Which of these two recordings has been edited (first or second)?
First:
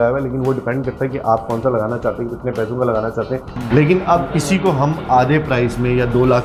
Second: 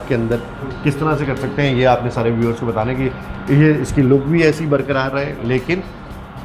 first